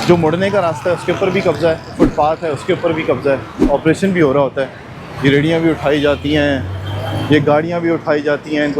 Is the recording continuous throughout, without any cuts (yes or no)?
no